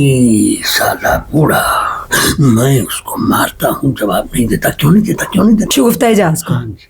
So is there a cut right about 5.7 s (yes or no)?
yes